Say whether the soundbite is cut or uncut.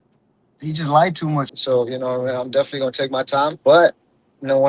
cut